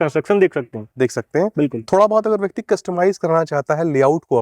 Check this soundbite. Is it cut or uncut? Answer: uncut